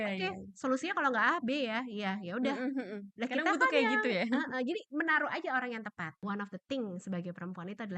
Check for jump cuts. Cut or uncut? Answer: cut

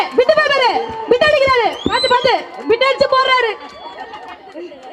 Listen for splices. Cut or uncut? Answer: uncut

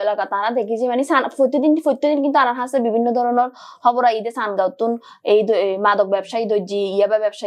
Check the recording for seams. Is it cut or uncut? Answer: uncut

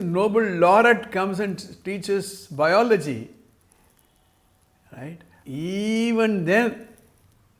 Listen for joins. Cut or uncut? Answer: cut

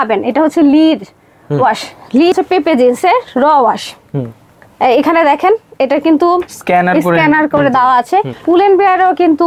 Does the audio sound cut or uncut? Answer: cut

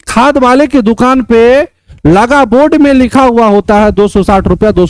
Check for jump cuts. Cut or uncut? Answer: uncut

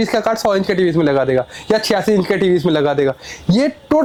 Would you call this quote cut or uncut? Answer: uncut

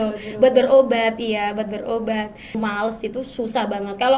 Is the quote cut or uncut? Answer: cut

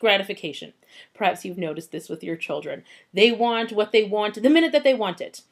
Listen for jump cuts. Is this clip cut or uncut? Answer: uncut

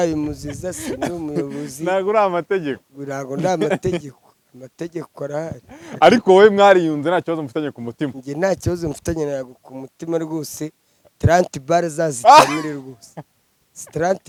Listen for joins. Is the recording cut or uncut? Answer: uncut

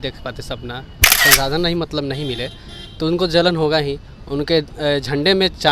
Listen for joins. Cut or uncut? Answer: cut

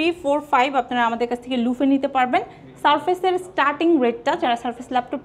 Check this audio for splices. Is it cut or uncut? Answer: uncut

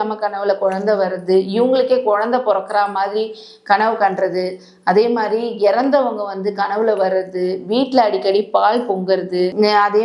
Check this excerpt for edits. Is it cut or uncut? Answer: uncut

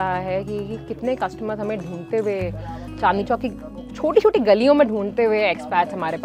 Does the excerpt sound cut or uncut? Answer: uncut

